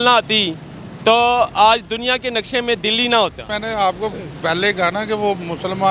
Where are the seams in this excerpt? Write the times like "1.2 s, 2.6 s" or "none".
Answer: 3.4 s